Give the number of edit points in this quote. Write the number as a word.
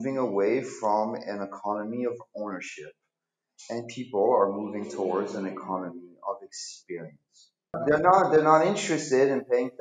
one